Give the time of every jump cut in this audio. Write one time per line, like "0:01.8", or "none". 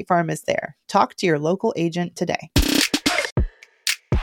0:03.3